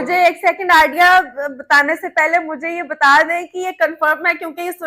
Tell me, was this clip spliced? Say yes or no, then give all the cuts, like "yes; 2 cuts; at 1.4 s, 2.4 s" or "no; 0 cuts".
no; 0 cuts